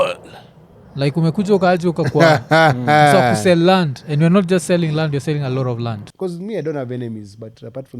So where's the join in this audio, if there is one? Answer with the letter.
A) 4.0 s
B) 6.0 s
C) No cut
B